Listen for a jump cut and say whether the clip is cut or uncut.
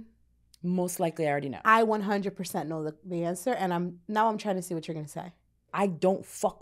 cut